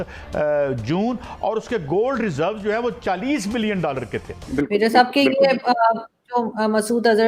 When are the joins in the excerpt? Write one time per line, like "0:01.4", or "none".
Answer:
0:04.4